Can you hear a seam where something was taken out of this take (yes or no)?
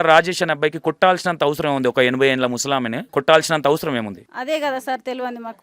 yes